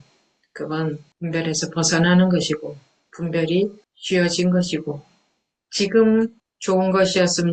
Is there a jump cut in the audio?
yes; 3 cuts; at 1.1 s, 3.9 s, 6.5 s

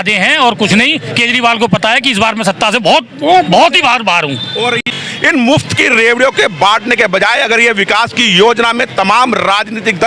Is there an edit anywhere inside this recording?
yes; 1 cut; at 4.9 s

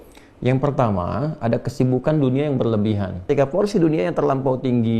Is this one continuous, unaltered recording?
no; 1 cut; at 3.2 s

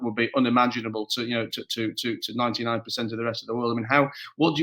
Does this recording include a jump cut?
no; 0 cuts

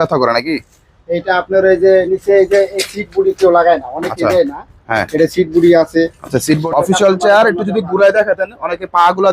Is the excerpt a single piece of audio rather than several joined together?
no; 1 cut; at 6.6 s

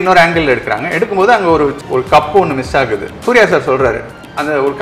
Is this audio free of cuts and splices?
no; 1 cut; at 3.2 s

